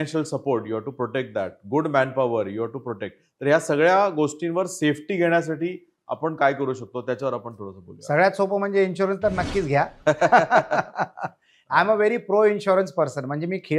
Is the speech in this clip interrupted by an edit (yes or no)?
no